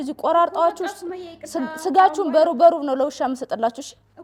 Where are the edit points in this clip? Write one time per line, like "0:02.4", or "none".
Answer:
none